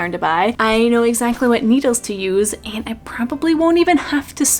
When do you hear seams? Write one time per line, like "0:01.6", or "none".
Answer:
none